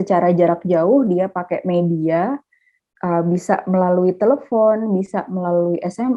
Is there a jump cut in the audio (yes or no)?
no